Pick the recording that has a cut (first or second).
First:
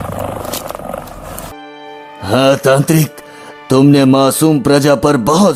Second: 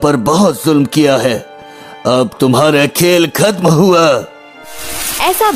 first